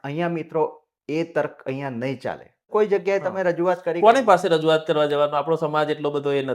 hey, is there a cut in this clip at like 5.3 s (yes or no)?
no